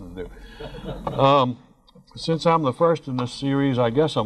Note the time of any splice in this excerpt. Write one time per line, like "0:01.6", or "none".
none